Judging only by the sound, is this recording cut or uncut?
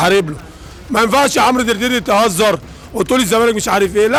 uncut